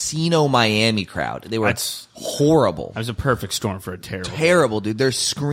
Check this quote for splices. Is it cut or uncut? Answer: uncut